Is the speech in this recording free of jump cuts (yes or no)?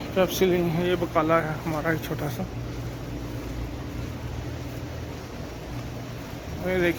yes